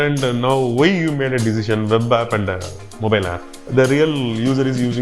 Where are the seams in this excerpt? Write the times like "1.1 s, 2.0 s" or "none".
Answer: 3.6 s